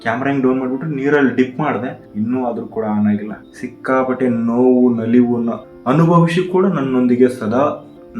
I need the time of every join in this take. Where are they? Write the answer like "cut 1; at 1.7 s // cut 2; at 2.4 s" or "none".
cut 1; at 2.0 s // cut 2; at 3.4 s